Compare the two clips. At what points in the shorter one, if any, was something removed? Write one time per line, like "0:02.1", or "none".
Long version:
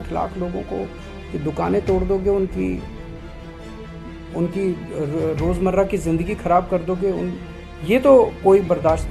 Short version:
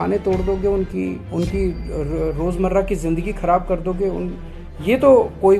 0:01.2